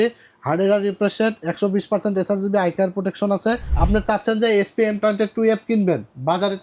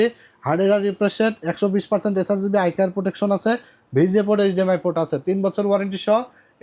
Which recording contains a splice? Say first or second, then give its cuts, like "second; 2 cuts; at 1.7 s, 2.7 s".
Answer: first; 1 cut; at 3.7 s